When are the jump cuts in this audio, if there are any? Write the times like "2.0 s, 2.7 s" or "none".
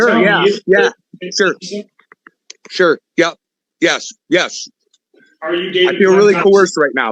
none